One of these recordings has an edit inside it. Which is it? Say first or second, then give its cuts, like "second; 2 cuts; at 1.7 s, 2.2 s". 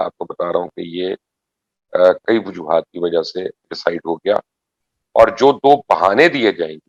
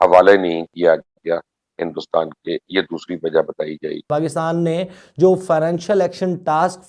second; 1 cut; at 4.1 s